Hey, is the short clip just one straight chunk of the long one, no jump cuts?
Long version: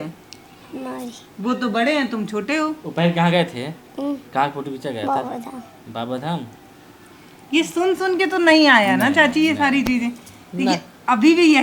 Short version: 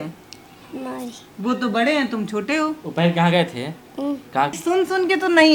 no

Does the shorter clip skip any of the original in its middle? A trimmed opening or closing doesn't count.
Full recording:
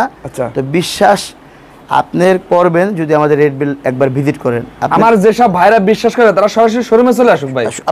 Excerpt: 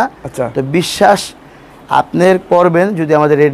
no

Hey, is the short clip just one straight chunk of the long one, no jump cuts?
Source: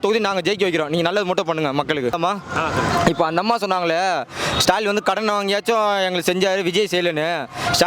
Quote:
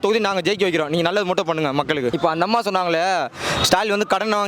no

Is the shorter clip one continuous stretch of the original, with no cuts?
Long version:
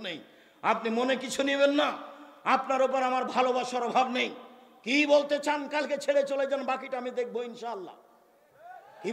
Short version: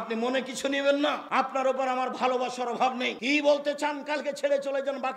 no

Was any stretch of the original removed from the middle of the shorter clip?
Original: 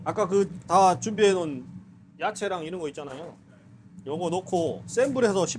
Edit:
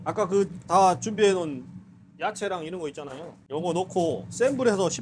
yes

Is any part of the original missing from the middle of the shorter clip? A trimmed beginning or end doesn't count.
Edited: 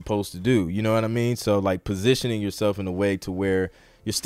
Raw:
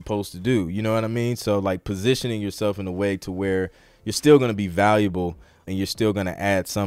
no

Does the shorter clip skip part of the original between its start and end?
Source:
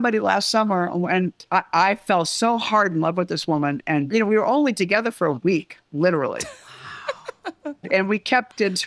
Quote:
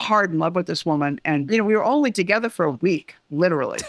no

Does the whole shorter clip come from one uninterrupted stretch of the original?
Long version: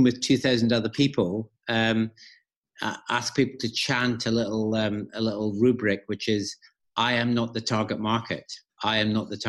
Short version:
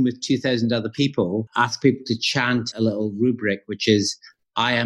no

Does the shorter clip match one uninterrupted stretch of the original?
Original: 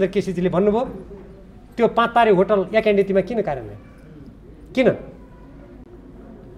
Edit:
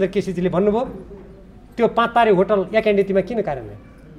yes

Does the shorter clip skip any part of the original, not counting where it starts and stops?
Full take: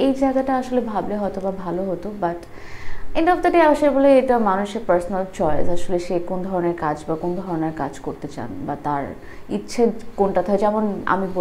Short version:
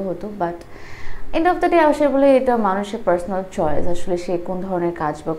no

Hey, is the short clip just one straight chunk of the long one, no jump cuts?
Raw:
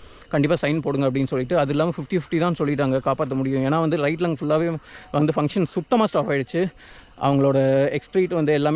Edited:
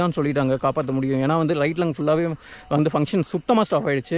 yes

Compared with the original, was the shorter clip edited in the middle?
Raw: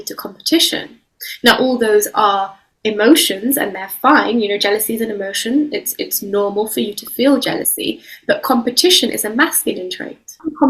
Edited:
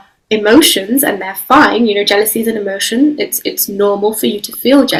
no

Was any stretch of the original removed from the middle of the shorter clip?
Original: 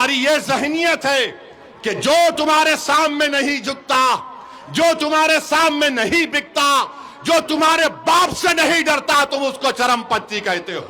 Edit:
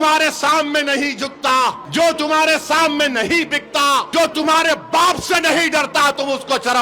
yes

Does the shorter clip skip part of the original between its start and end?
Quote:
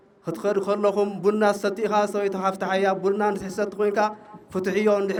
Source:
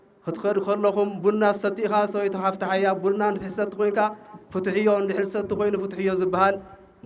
no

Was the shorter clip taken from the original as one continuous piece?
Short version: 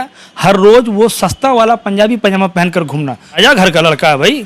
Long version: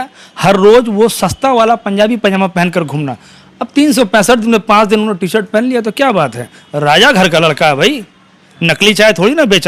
no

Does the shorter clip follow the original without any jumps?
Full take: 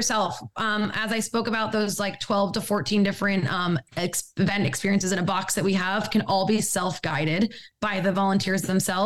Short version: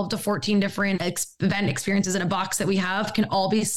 no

